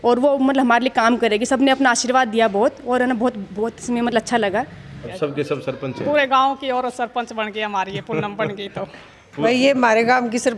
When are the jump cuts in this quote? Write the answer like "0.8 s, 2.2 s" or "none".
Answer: 5.0 s, 9.4 s